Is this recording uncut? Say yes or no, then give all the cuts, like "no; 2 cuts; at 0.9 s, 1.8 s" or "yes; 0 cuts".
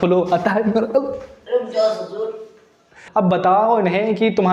no; 1 cut; at 3.0 s